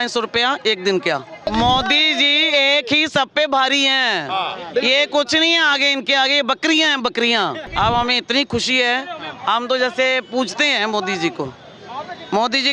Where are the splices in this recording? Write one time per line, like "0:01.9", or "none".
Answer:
0:01.5
0:07.6